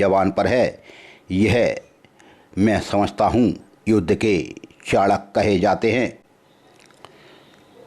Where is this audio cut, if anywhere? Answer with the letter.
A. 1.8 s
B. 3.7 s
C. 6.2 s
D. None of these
C